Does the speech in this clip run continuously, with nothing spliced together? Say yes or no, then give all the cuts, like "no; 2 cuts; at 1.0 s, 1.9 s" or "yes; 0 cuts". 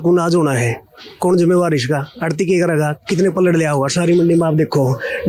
yes; 0 cuts